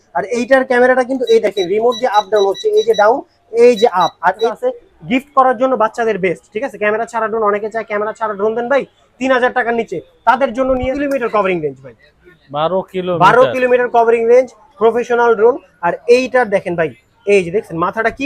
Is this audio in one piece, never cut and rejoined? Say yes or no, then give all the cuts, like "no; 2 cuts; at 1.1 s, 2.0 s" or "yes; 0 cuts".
no; 2 cuts; at 4.4 s, 10.9 s